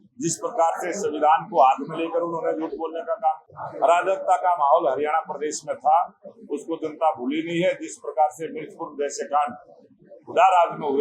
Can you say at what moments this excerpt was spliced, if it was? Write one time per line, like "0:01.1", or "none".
0:03.5